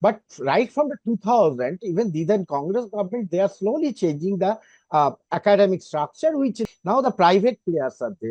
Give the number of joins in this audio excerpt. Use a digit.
1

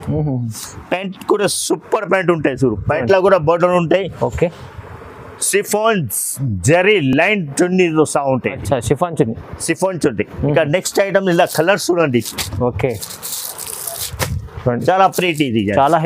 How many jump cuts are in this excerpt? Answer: 0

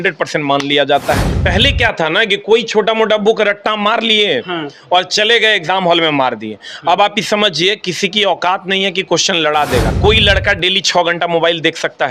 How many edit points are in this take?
2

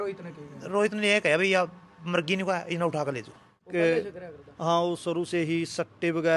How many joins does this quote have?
1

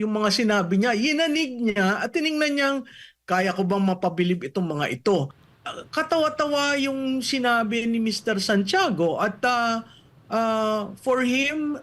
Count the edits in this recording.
1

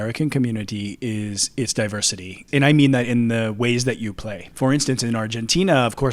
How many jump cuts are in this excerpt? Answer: 2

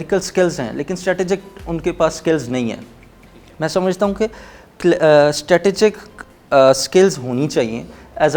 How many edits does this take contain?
0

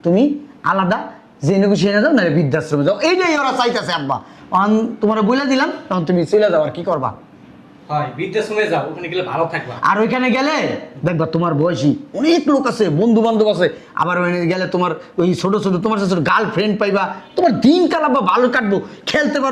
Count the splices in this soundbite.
0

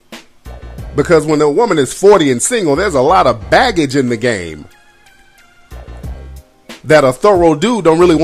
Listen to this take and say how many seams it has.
1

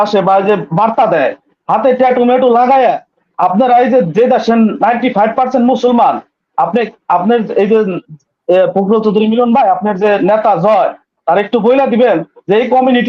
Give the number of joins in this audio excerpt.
1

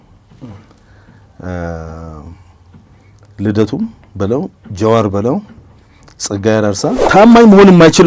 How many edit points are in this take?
1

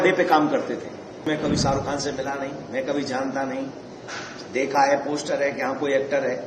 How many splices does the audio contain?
1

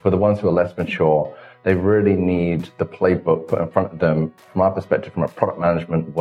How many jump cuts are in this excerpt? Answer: 1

